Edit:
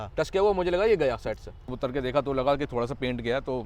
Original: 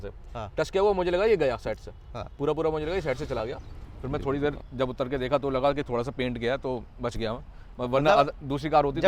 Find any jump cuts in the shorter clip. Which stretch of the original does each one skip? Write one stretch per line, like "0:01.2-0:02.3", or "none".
0:02.2-0:04.9